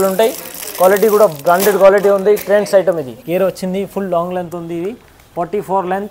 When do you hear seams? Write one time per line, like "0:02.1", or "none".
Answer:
0:03.1